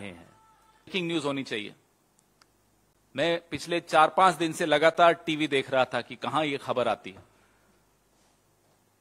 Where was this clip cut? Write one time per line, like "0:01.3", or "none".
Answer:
0:00.9